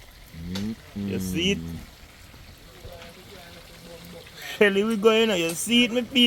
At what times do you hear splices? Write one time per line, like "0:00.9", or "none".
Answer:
none